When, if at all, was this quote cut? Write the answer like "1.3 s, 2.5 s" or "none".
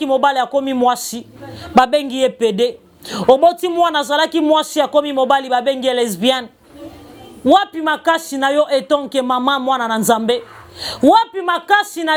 none